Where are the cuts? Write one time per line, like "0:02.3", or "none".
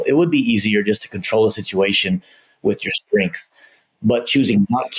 none